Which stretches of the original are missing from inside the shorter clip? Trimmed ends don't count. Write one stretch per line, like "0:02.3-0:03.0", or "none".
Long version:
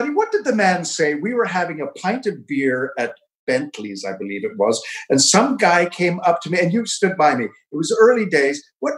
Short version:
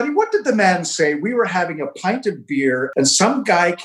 0:02.9-0:05.0